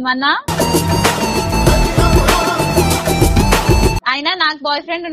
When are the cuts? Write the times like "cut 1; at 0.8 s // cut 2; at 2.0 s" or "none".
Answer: cut 1; at 4.1 s